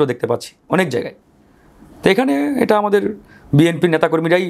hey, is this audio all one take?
yes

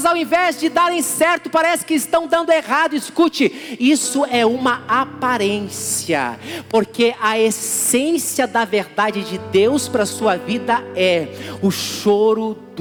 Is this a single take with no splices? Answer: yes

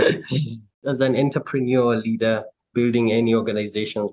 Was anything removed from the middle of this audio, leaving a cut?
yes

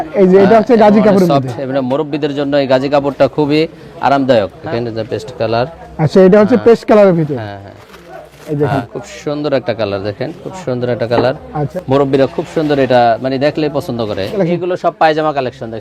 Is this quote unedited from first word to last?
no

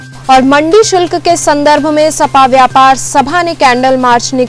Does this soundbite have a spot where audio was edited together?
no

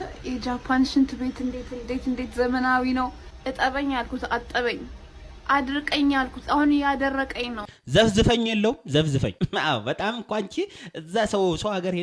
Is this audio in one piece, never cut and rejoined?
no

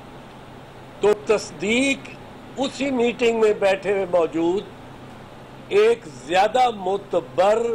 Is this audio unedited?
no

